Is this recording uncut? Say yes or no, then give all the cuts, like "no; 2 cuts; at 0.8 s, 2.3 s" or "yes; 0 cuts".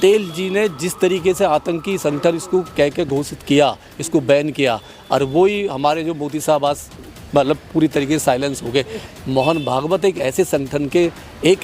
no; 1 cut; at 9.1 s